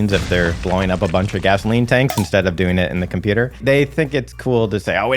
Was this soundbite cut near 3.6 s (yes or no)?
yes